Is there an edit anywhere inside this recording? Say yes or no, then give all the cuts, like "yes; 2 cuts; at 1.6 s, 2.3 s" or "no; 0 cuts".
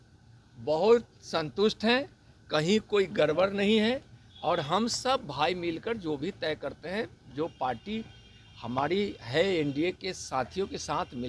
no; 0 cuts